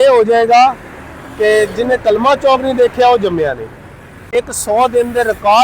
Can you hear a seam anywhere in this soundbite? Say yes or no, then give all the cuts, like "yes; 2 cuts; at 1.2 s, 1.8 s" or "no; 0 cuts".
yes; 1 cut; at 4.3 s